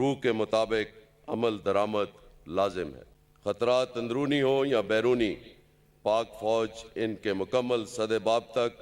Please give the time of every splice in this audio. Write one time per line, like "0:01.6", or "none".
0:03.0